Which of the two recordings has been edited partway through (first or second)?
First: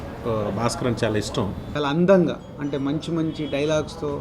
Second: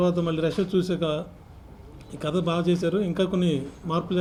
first